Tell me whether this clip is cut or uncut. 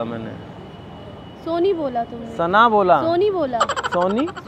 uncut